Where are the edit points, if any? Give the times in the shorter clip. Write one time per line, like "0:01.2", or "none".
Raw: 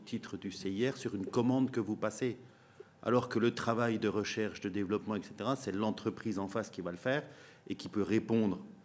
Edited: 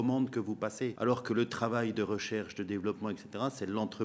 0:00.9